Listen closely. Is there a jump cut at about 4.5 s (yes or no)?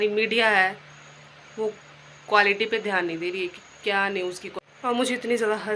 yes